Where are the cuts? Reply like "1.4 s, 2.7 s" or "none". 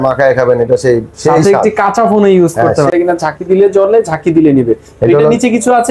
2.9 s

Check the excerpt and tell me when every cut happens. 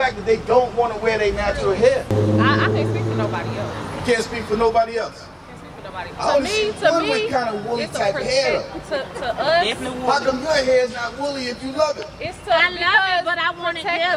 2.1 s

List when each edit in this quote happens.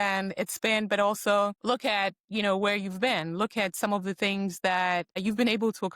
1.6 s, 5.2 s

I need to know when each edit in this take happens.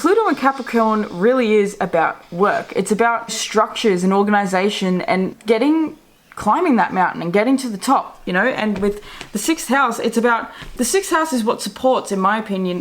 3.4 s, 5.4 s

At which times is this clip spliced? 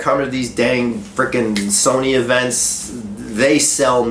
none

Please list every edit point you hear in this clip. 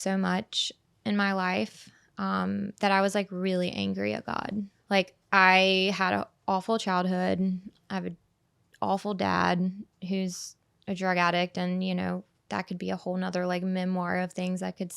4.8 s

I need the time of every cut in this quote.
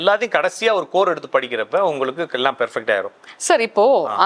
none

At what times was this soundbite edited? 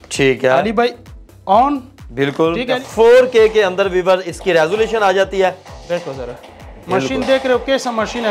2.8 s

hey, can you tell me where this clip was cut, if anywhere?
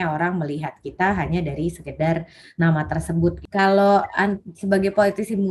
3.4 s

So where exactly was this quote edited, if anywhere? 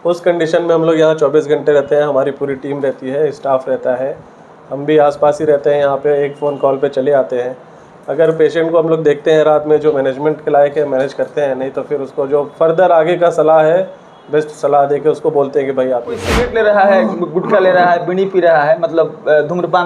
16.3 s

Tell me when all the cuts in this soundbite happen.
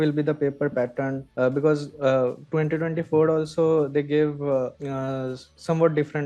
none

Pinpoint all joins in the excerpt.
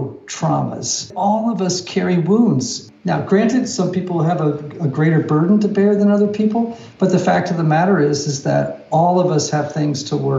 1.1 s, 2.8 s

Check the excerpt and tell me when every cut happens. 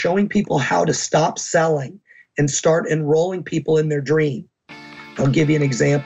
5.2 s

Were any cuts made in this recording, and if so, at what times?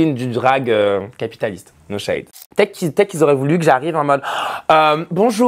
2.2 s

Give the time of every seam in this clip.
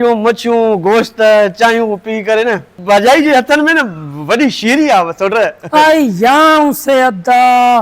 2.7 s

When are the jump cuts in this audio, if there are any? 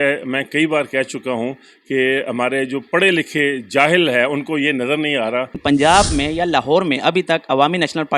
5.6 s

